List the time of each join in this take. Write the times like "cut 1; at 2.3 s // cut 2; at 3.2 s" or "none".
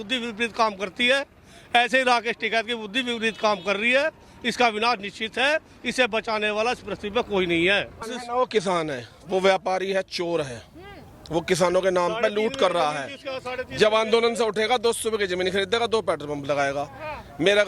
cut 1; at 8.0 s